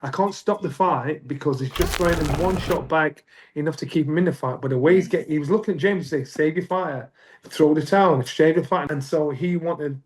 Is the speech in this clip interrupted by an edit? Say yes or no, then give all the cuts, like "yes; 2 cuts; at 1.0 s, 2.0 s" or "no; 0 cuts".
yes; 1 cut; at 8.8 s